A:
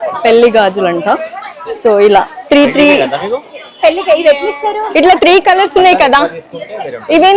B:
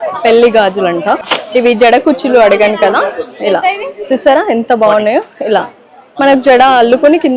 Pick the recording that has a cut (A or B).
B